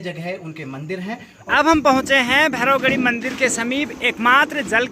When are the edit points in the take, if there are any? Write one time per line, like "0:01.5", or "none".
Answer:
0:01.3